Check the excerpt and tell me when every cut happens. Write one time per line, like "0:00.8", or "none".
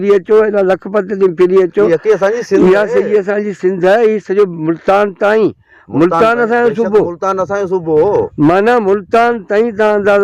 none